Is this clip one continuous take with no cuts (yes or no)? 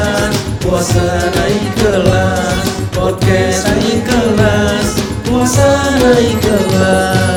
yes